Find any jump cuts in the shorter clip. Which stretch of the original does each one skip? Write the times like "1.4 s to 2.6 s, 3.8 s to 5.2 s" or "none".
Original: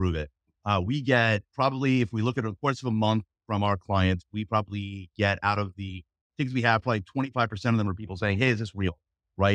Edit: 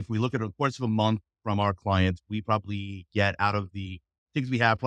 none